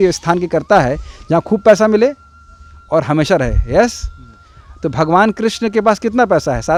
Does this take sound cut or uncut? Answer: uncut